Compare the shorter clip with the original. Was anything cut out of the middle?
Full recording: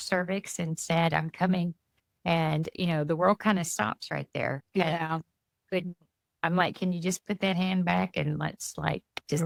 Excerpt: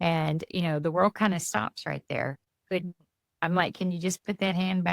yes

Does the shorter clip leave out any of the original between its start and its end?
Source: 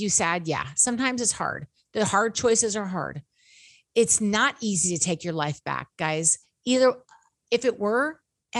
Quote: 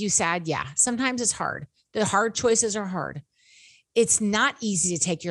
no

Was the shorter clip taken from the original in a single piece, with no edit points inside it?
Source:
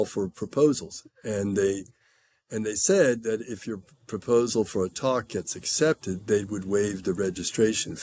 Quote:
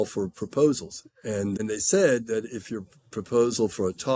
no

